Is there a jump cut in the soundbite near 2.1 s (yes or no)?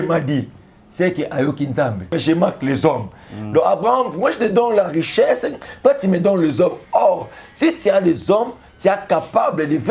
yes